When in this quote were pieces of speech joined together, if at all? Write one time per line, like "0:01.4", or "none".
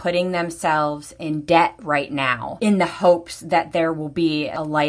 none